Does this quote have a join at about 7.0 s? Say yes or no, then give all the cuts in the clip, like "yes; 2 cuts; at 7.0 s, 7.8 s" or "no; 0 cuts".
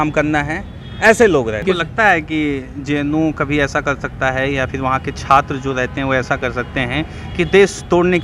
no; 1 cut; at 1.6 s